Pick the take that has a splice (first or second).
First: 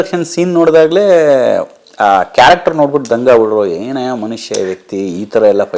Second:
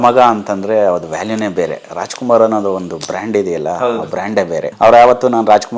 second